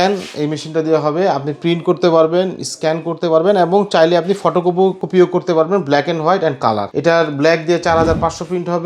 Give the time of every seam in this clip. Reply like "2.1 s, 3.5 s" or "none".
5.0 s, 6.9 s

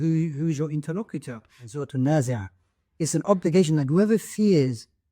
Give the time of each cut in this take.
1.8 s

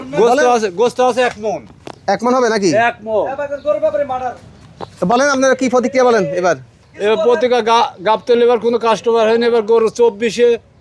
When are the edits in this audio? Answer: none

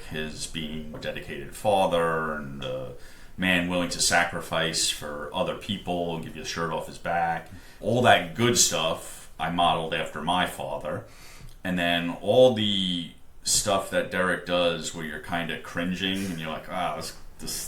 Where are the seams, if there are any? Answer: 2.5 s

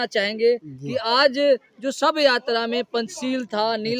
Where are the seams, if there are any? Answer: none

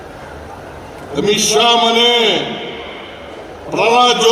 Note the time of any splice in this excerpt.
none

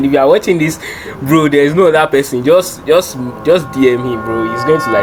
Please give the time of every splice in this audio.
none

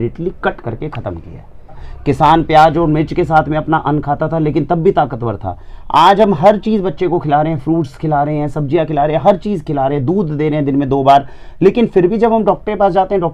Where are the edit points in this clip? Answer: 1.9 s

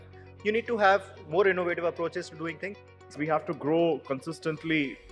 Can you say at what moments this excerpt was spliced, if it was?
2.9 s

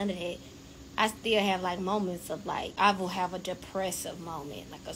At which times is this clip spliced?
2.7 s

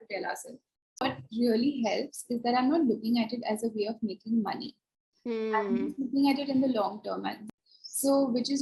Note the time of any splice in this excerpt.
1.0 s, 7.5 s

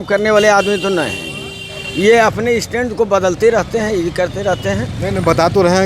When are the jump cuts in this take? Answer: none

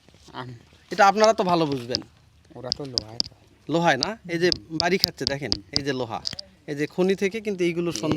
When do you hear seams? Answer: none

